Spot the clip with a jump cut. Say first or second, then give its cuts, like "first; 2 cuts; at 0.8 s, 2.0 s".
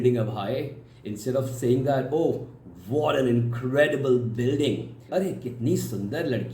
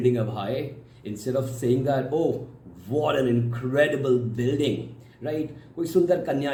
first; 1 cut; at 5.0 s